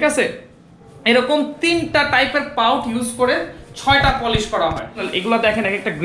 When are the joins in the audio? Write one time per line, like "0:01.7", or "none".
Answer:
0:05.1